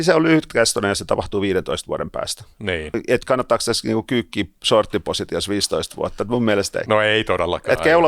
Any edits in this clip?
yes; 1 cut; at 6.8 s

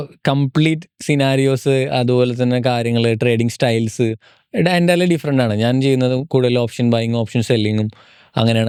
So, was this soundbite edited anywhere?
no; 0 cuts

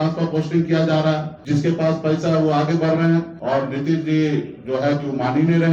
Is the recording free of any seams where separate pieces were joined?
no; 2 cuts; at 1.3 s, 3.3 s

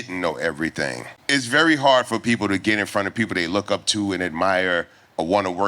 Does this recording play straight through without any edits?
no; 1 cut; at 1.1 s

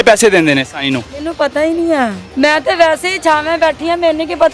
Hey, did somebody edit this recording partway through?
yes; 1 cut; at 2.2 s

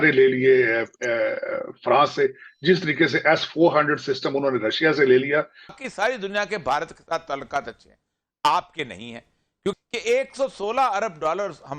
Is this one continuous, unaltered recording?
no; 2 cuts; at 5.7 s, 9.7 s

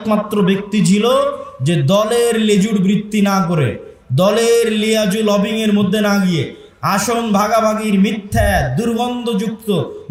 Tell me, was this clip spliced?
no; 0 cuts

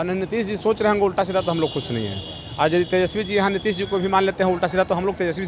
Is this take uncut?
yes; 0 cuts

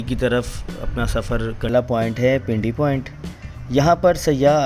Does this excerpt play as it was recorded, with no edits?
no; 1 cut; at 1.7 s

